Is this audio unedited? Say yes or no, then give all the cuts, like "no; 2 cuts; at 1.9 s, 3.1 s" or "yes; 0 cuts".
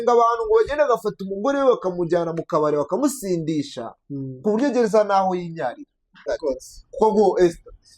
no; 1 cut; at 6.3 s